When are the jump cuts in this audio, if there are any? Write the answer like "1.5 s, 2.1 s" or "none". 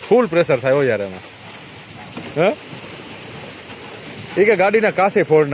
none